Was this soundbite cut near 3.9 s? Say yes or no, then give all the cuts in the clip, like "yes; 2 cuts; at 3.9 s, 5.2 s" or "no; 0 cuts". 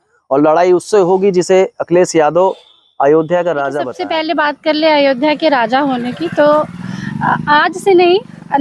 yes; 1 cut; at 3.9 s